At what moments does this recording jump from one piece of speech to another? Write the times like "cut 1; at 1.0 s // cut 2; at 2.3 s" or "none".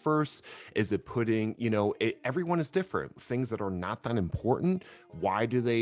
cut 1; at 3.2 s